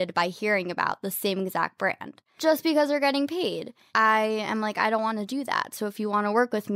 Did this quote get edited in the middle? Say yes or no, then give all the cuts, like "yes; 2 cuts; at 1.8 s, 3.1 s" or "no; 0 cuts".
yes; 2 cuts; at 2.3 s, 3.8 s